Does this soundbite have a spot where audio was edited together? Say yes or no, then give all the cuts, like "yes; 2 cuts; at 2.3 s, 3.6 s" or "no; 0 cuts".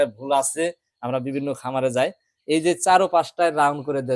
no; 0 cuts